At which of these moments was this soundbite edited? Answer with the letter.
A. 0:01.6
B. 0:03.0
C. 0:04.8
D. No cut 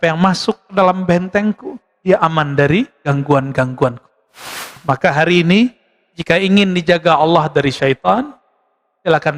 C